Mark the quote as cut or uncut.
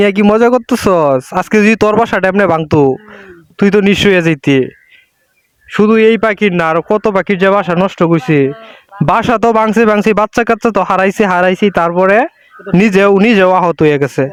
uncut